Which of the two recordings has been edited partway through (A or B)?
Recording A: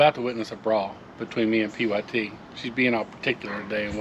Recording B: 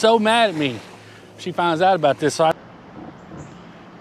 B